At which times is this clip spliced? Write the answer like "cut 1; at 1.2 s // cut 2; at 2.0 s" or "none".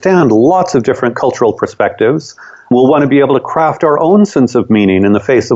cut 1; at 2.7 s